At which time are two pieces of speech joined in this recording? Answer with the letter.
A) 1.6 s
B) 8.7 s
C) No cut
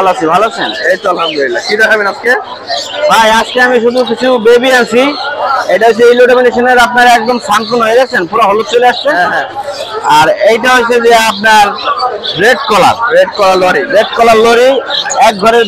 C